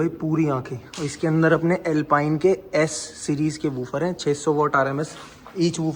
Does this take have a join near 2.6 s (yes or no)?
no